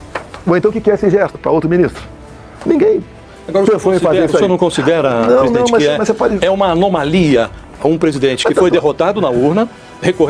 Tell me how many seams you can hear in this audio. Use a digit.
0